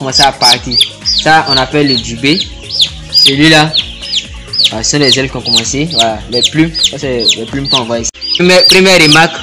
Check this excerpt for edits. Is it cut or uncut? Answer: cut